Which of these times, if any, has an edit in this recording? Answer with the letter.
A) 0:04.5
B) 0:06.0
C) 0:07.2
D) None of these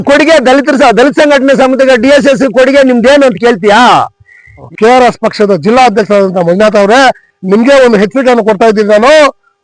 A